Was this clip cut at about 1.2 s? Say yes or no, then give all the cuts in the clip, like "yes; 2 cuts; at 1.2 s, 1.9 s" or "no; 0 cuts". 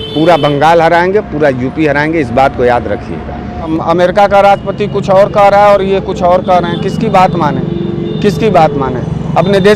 no; 1 cut; at 3.7 s